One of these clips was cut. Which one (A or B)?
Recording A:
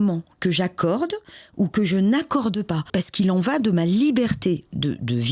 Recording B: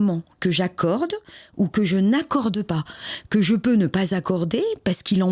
A